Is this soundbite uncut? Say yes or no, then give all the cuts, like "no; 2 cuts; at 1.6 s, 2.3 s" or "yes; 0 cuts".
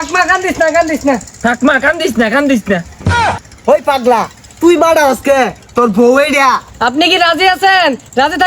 no; 3 cuts; at 1.3 s, 3.4 s, 6.7 s